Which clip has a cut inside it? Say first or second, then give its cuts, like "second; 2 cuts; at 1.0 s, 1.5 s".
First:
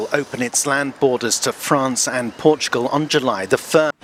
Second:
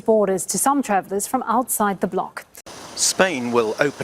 second; 1 cut; at 2.8 s